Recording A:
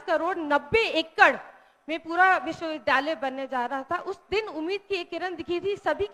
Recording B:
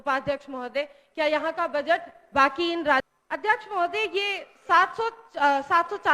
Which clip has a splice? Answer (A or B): B